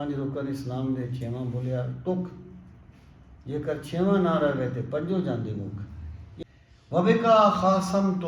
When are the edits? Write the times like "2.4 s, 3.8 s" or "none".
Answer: 6.4 s